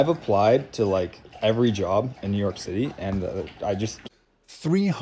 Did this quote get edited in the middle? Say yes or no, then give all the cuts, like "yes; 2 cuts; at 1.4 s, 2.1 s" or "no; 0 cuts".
yes; 1 cut; at 4.0 s